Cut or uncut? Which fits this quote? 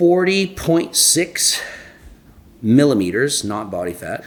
uncut